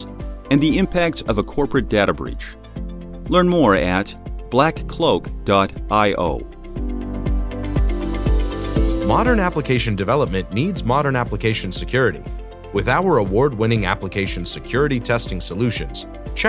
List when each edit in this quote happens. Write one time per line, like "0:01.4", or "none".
0:06.6
0:09.0